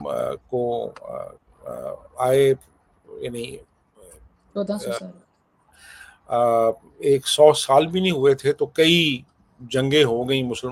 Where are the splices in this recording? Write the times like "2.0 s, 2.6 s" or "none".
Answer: none